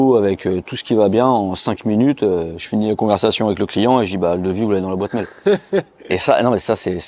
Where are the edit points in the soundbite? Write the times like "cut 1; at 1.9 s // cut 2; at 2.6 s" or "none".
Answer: none